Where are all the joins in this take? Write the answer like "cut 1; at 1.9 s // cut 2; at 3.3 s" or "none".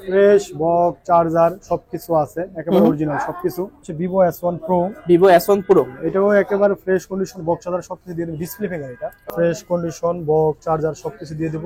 cut 1; at 3.8 s // cut 2; at 9.3 s